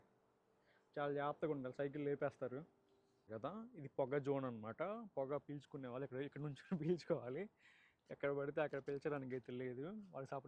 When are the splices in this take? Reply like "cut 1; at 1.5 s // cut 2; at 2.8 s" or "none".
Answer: cut 1; at 3.3 s